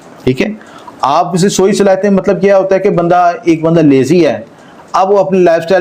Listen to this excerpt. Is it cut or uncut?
uncut